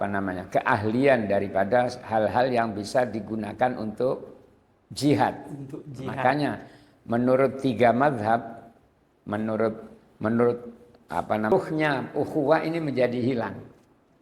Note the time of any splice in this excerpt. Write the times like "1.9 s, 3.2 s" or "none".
11.5 s

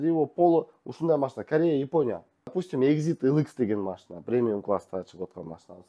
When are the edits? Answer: 2.5 s

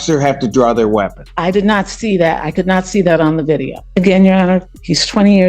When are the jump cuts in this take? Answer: 1.2 s, 3.8 s

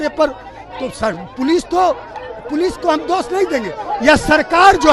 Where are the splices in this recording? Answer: none

